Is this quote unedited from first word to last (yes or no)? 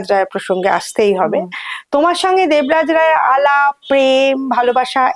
yes